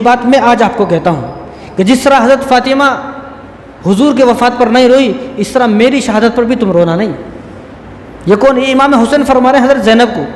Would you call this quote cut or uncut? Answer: uncut